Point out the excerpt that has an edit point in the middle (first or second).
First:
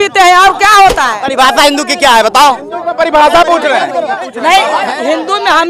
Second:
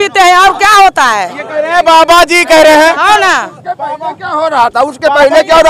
first